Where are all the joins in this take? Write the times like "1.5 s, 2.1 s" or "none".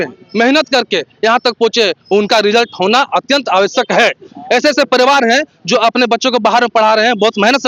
none